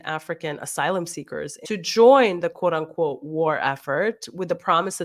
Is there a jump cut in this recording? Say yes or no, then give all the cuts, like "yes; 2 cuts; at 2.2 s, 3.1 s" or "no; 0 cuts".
yes; 1 cut; at 1.5 s